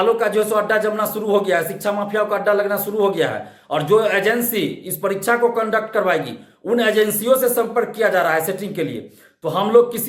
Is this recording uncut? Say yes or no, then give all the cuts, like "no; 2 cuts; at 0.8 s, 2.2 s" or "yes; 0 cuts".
yes; 0 cuts